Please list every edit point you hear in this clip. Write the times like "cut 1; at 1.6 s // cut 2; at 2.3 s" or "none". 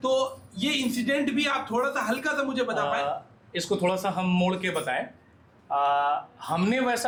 none